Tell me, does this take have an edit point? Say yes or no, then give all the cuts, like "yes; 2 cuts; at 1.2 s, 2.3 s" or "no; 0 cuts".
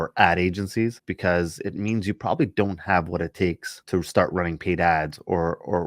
yes; 2 cuts; at 1.1 s, 3.7 s